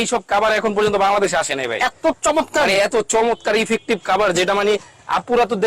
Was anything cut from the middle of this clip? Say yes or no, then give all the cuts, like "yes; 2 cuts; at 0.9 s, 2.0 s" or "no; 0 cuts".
no; 0 cuts